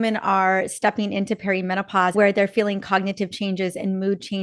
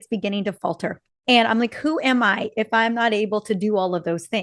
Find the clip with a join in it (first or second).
first